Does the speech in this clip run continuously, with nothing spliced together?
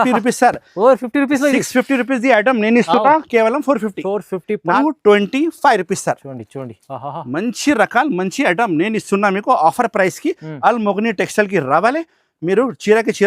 no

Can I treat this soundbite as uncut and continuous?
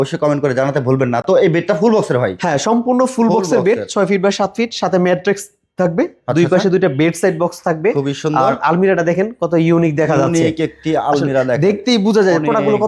yes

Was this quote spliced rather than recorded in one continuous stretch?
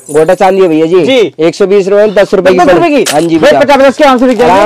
no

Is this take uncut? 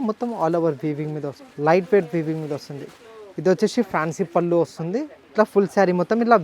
no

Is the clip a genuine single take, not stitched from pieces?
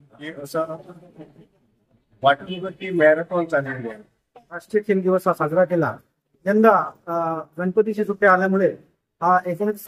no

